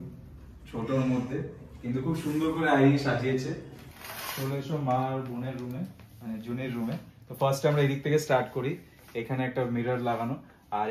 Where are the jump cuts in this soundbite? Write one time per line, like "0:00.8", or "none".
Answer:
0:03.9